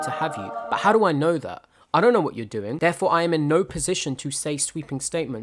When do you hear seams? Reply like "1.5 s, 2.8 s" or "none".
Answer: 2.7 s